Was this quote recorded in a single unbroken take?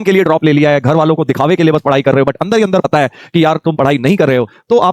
yes; 0 cuts

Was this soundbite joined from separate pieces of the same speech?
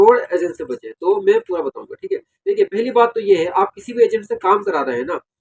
no; 0 cuts

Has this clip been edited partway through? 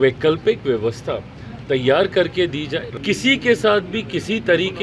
yes; 1 cut; at 2.8 s

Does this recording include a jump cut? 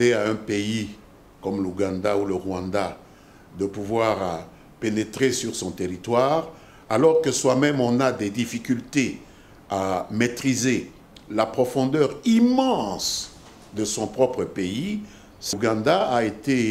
yes; 1 cut; at 15.5 s

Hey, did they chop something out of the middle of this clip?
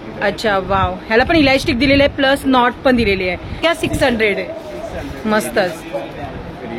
yes; 1 cut; at 3.6 s

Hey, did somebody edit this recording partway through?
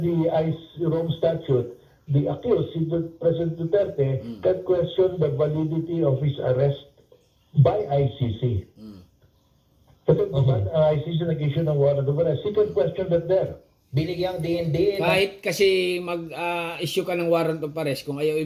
no; 0 cuts

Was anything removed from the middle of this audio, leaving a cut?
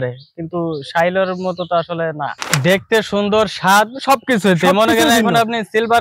yes; 1 cut; at 2.4 s

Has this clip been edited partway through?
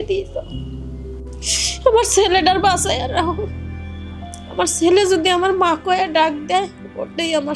no; 0 cuts

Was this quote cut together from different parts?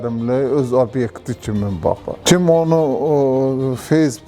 yes; 1 cut; at 2.1 s

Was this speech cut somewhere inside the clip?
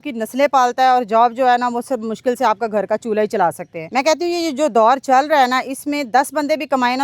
yes; 1 cut; at 3.7 s

